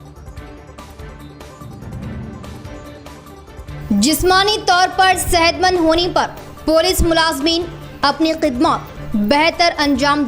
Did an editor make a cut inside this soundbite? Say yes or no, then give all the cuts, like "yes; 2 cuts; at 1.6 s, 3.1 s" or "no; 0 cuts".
no; 0 cuts